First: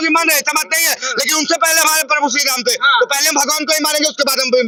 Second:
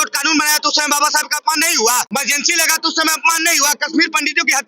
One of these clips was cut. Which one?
second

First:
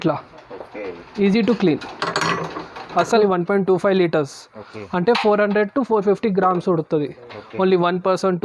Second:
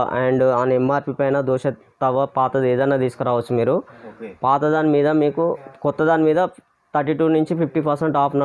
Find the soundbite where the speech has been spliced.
first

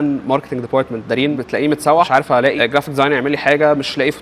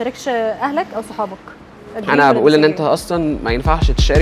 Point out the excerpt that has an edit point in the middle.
first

